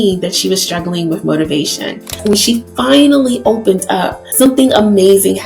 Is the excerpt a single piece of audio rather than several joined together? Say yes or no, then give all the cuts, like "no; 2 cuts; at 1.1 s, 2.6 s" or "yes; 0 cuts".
no; 2 cuts; at 2.2 s, 4.5 s